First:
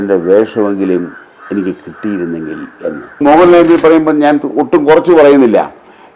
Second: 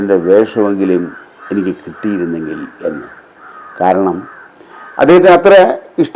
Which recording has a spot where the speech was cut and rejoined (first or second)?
first